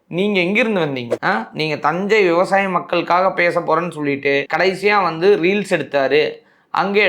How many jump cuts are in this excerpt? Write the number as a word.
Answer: one